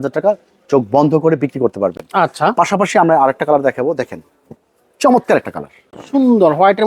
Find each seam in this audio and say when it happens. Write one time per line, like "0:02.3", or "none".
none